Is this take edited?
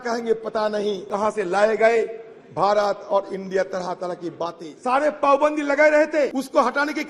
yes; 3 cuts; at 1.0 s, 4.7 s, 6.3 s

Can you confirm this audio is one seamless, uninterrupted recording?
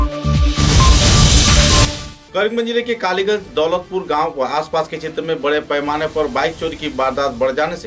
no; 1 cut; at 1.6 s

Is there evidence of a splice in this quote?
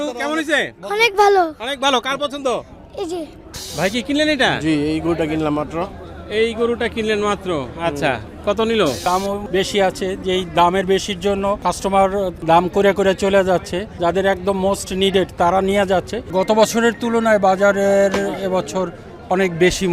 yes; 6 cuts; at 3.5 s, 9.1 s, 11.6 s, 12.4 s, 13.8 s, 16.3 s

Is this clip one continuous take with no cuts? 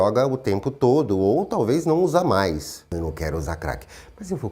no; 1 cut; at 2.8 s

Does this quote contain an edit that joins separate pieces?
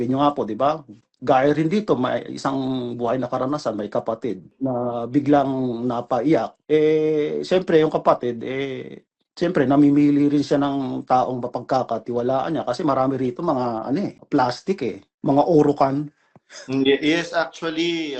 yes; 1 cut; at 15.1 s

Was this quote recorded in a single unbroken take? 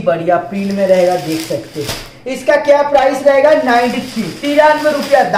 yes; 0 cuts

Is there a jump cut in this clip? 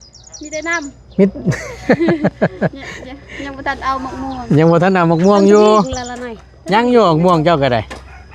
no; 0 cuts

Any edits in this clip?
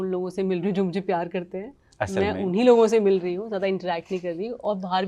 no; 0 cuts

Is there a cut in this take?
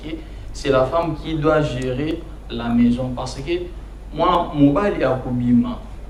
no; 0 cuts

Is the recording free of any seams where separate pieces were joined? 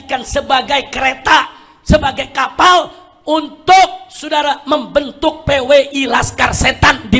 yes; 0 cuts

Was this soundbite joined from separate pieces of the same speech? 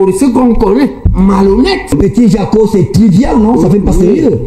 yes; 1 cut; at 1.9 s

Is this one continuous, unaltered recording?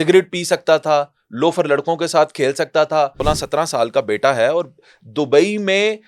no; 1 cut; at 3.2 s

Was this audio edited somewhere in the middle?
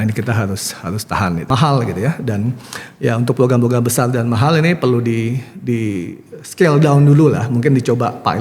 yes; 1 cut; at 1.5 s

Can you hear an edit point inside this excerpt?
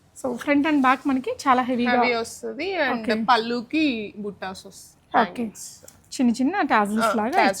no; 0 cuts

